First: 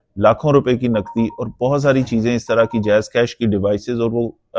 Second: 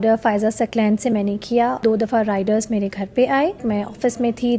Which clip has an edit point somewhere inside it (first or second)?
second